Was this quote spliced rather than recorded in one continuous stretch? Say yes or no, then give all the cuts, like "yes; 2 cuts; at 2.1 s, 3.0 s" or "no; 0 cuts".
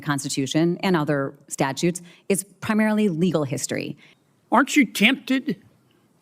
yes; 1 cut; at 4.0 s